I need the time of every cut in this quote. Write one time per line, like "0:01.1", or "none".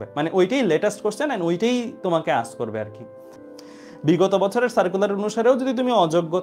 0:03.4